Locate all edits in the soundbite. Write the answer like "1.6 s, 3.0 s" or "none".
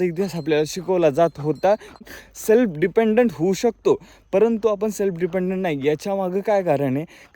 2.0 s